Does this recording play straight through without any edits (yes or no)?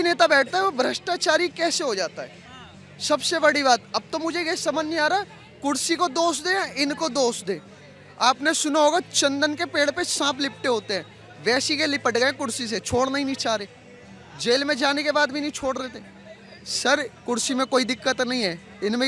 yes